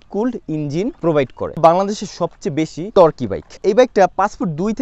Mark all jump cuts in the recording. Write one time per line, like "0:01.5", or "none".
0:01.6
0:02.8
0:03.5